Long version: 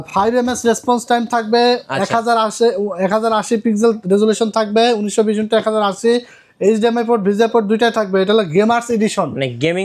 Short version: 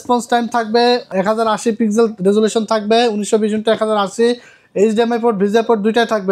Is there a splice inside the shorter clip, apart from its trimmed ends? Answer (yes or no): yes